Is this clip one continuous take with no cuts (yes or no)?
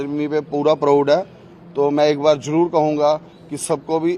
yes